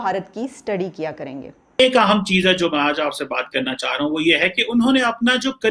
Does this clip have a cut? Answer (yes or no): yes